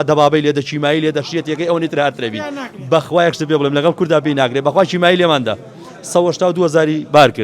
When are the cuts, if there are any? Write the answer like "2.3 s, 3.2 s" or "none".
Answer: none